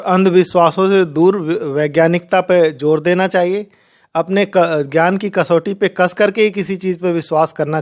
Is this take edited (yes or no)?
no